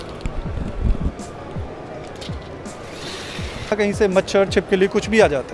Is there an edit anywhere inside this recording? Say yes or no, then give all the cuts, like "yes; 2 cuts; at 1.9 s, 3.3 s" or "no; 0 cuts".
yes; 1 cut; at 3.7 s